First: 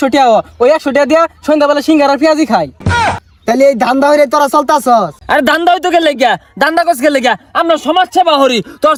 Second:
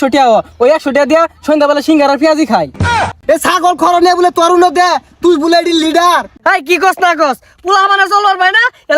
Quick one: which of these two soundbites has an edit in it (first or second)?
second